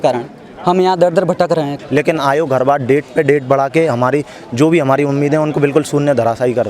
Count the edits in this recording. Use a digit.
1